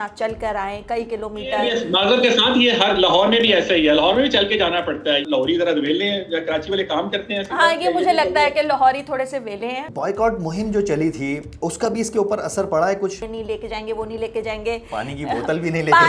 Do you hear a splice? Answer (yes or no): yes